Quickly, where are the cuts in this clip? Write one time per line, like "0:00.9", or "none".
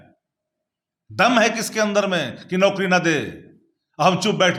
none